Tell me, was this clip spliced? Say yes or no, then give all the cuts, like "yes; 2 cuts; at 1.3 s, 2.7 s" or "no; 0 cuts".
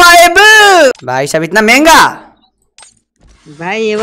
yes; 1 cut; at 1.0 s